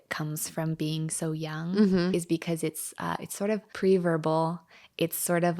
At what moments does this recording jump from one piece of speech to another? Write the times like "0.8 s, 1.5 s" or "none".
3.7 s